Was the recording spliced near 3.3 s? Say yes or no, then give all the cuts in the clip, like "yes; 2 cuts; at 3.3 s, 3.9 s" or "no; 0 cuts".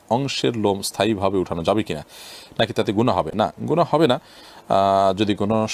no; 0 cuts